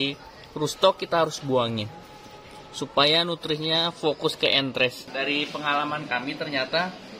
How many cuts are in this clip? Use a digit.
1